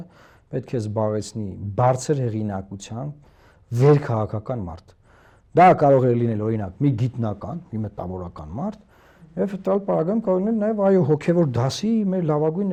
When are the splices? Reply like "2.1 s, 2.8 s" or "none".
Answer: none